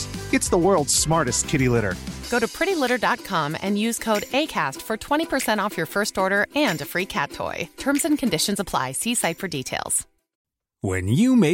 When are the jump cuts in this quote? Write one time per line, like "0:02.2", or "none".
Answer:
none